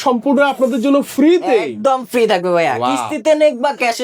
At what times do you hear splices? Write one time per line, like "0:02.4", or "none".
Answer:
none